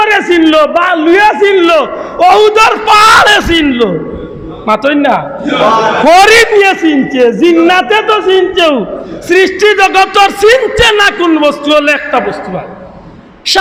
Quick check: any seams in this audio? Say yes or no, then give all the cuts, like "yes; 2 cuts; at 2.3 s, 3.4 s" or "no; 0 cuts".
no; 0 cuts